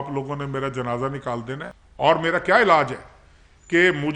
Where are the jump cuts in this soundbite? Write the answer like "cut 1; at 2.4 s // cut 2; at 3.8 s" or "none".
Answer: cut 1; at 1.7 s